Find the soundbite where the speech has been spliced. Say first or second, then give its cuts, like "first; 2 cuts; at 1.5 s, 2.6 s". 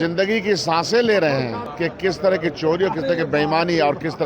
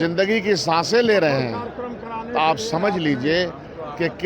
first; 1 cut; at 1.6 s